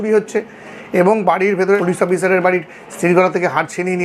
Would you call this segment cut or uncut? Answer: cut